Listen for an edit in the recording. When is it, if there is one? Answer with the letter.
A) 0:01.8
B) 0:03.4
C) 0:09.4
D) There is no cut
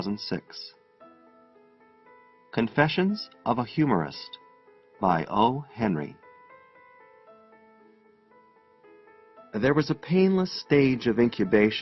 A